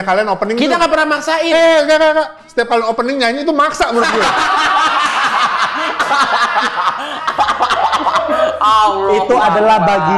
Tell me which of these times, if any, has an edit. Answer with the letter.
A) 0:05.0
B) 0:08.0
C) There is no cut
C